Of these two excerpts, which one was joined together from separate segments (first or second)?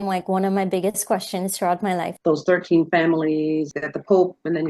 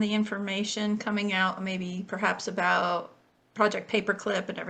first